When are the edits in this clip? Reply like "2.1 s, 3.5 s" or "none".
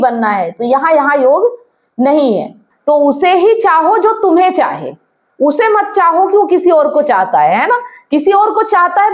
2.7 s